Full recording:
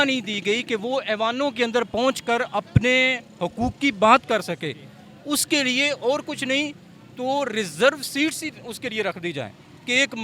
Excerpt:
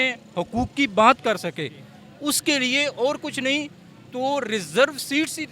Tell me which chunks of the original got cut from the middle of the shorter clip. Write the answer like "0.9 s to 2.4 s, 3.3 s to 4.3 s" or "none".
none